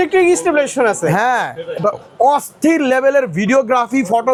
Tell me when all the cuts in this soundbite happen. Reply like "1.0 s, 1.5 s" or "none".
none